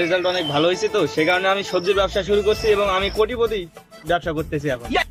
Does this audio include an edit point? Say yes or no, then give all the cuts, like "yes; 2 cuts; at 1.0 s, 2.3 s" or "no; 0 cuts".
no; 0 cuts